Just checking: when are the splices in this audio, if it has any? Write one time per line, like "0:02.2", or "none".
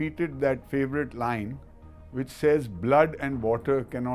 none